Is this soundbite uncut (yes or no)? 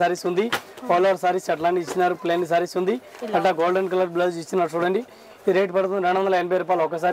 yes